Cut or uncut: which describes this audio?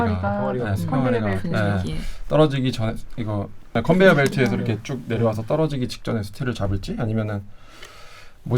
cut